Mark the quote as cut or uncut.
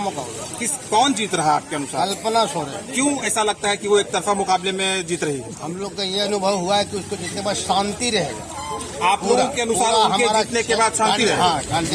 uncut